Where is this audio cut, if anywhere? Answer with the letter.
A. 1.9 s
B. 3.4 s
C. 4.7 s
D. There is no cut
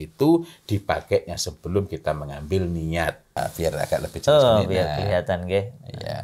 B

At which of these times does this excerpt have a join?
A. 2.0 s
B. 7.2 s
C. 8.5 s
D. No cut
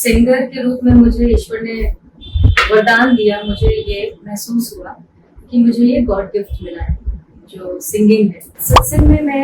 C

